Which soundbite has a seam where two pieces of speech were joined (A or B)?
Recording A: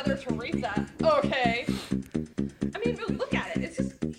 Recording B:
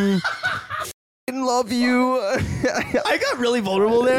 B